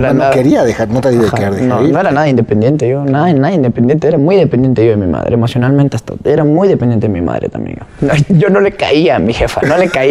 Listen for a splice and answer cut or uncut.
cut